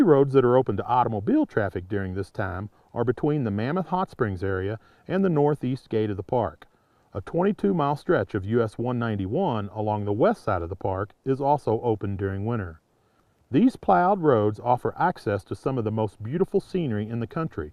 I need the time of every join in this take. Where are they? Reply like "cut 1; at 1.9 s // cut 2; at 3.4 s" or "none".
cut 1; at 14.9 s